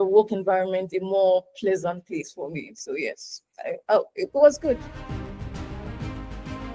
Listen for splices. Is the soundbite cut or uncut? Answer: cut